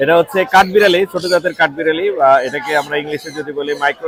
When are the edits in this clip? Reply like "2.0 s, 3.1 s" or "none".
none